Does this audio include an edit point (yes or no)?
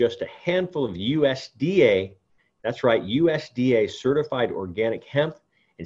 no